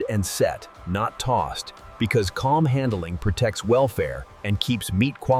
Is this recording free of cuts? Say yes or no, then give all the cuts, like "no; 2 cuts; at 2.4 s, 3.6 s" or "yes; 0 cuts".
yes; 0 cuts